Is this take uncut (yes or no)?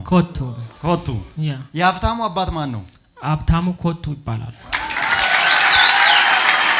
yes